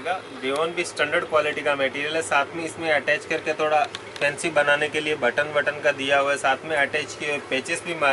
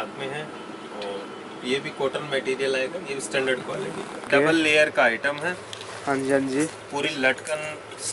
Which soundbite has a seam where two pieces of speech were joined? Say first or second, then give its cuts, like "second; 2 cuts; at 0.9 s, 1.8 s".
second; 1 cut; at 4.2 s